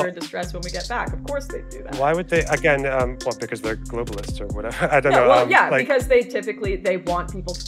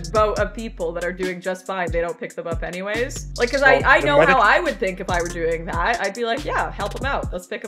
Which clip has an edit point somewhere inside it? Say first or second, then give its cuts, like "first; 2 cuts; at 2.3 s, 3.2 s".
second; 1 cut; at 3.2 s